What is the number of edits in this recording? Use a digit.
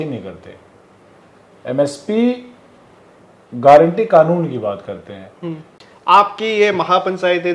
1